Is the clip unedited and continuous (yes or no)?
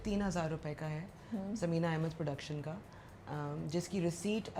yes